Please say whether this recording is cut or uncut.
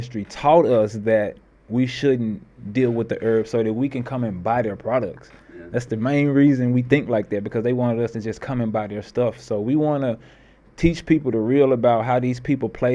uncut